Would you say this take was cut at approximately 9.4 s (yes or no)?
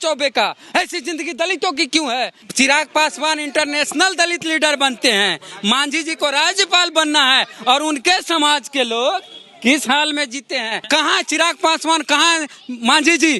no